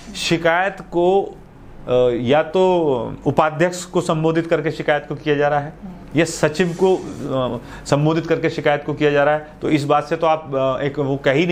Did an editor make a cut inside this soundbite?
no; 0 cuts

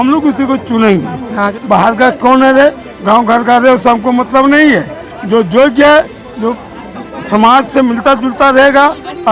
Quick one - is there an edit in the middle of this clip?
yes; 1 cut; at 1.5 s

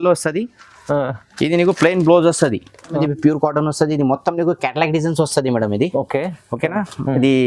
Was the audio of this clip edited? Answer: yes; 1 cut; at 3.0 s

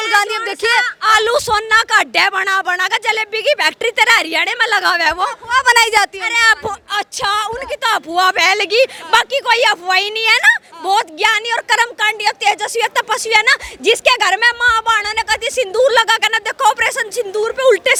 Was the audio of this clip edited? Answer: no; 0 cuts

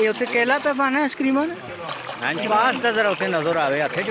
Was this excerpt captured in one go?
yes; 0 cuts

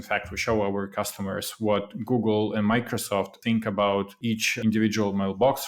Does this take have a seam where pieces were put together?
yes; 2 cuts; at 3.3 s, 4.4 s

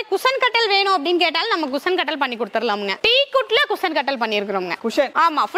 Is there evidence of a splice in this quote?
no; 0 cuts

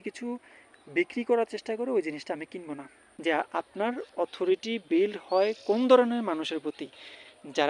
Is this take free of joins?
no; 1 cut; at 3.0 s

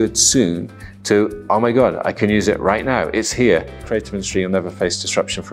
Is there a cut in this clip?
yes; 1 cut; at 3.8 s

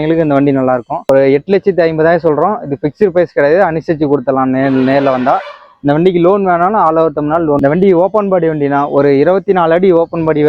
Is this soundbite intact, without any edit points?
no; 2 cuts; at 1.0 s, 7.6 s

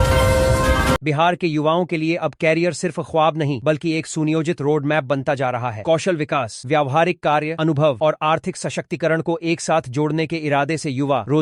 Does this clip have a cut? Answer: yes; 1 cut; at 1.0 s

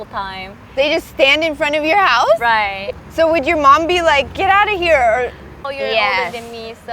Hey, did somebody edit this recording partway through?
yes; 2 cuts; at 2.8 s, 5.7 s

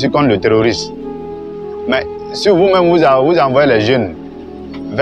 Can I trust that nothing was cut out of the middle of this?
yes; 0 cuts

